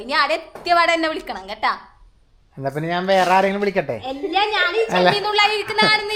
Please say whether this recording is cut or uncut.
uncut